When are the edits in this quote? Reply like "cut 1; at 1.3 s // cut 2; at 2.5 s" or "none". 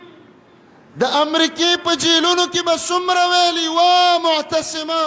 none